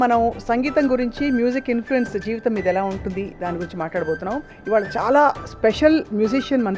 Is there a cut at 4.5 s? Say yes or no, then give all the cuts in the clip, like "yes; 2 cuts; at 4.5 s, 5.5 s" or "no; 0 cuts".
yes; 1 cut; at 4.5 s